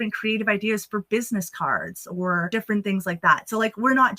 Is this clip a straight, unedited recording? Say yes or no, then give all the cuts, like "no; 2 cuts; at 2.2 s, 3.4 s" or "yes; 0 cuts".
no; 1 cut; at 2.5 s